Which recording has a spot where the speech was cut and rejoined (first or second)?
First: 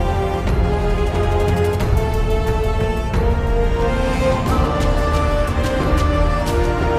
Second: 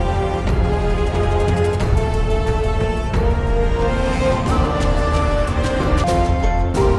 second